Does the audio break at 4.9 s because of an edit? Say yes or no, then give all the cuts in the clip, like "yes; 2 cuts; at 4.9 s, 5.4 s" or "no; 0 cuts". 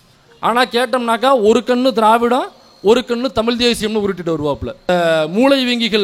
yes; 1 cut; at 4.9 s